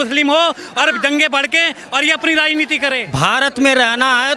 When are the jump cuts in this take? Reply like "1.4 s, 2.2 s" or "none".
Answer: 3.1 s